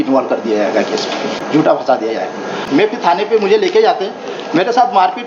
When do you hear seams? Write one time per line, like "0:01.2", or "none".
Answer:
0:01.4
0:02.5